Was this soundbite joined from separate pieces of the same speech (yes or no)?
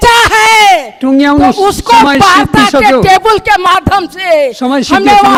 no